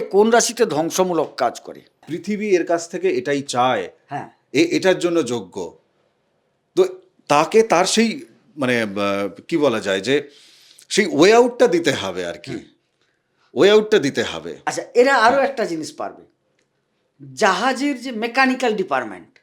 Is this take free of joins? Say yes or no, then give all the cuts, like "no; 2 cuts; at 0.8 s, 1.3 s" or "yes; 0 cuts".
no; 1 cut; at 2.1 s